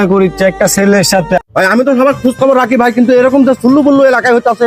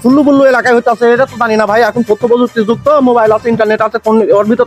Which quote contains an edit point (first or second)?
first